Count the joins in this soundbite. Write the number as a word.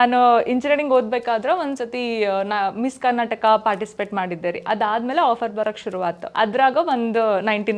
one